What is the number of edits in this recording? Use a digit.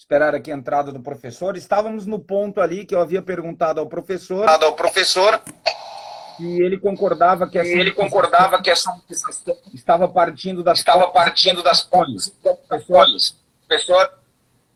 0